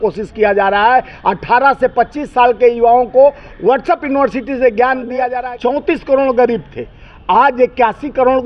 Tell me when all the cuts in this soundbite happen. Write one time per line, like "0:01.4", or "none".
0:05.3